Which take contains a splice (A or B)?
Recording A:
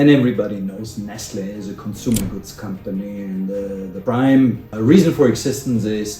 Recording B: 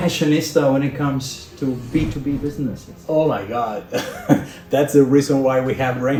A